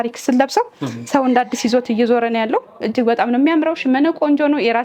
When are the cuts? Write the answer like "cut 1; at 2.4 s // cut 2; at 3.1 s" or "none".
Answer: none